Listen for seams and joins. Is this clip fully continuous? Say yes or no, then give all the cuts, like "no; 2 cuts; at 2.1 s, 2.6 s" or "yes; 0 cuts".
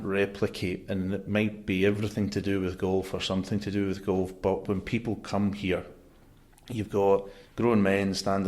no; 1 cut; at 7.4 s